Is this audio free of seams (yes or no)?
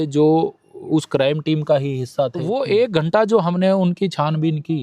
no